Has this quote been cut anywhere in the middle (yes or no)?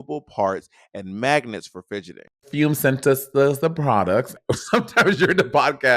yes